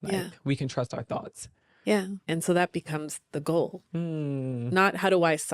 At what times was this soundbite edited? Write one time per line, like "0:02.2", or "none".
0:02.2
0:03.8